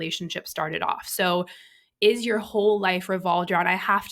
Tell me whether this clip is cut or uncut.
uncut